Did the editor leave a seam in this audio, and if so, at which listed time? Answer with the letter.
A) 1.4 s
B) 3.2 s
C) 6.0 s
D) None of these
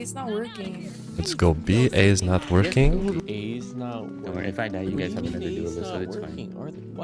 B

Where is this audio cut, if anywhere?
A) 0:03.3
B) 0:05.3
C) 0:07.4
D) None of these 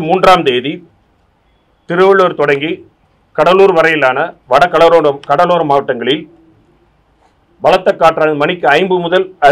D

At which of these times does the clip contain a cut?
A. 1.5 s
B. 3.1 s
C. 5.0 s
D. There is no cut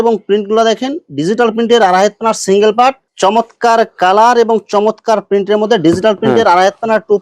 B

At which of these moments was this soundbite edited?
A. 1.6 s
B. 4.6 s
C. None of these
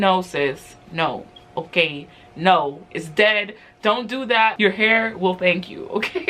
B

